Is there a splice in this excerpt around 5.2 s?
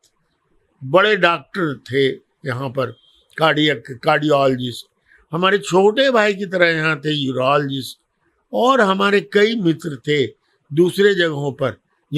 no; 0 cuts

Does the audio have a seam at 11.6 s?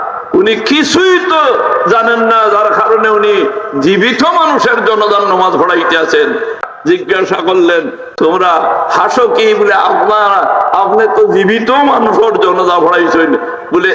no; 1 cut; at 6.4 s

